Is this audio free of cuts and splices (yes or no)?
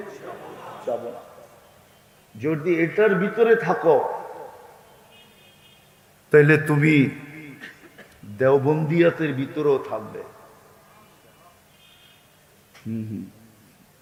yes